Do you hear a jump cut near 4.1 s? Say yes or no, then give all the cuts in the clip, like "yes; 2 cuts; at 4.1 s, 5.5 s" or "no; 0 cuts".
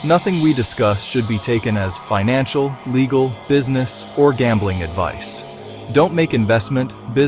no; 0 cuts